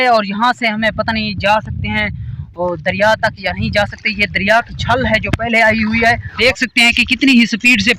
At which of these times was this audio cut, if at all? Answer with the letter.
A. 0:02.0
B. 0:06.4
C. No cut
B